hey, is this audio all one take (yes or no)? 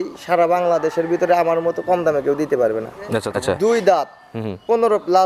no